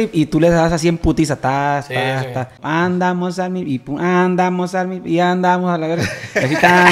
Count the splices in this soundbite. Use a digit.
1